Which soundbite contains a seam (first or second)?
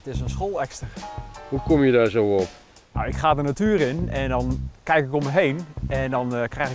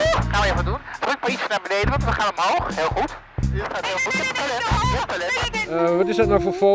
second